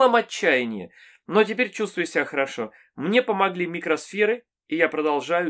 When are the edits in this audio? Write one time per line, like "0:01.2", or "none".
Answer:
none